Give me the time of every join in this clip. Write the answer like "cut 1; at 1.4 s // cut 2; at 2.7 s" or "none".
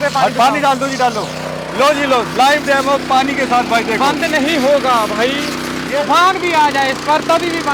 cut 1; at 1.6 s // cut 2; at 5.8 s